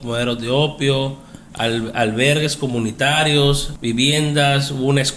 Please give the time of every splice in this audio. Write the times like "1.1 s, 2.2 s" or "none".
3.7 s